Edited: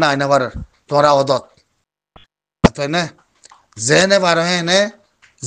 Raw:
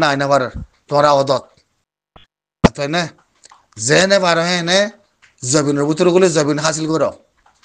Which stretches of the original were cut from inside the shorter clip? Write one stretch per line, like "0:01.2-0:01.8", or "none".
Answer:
none